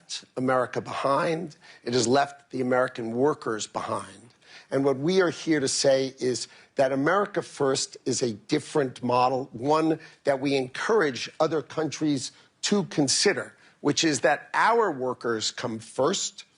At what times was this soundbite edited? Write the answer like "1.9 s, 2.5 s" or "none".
none